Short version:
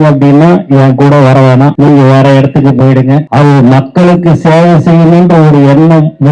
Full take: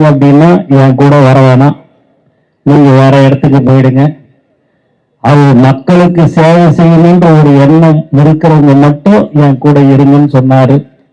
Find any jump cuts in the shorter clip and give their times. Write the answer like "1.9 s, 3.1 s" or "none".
1.7 s, 3.3 s